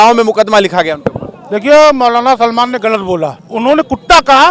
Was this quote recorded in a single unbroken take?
no; 1 cut; at 3.4 s

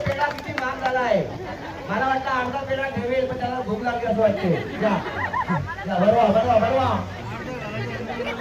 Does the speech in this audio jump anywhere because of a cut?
no; 0 cuts

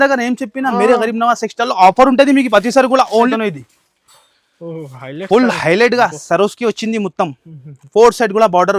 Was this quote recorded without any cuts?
no; 1 cut; at 3.3 s

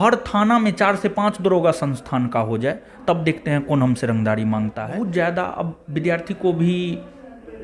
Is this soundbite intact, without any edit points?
no; 1 cut; at 4.8 s

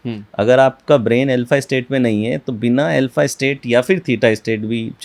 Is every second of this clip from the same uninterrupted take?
yes; 0 cuts

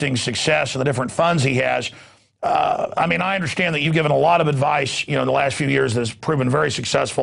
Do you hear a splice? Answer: yes; 1 cut; at 4.0 s

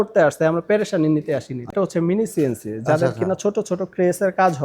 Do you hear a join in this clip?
yes; 1 cut; at 1.7 s

